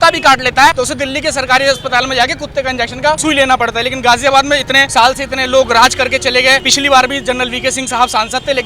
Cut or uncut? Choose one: cut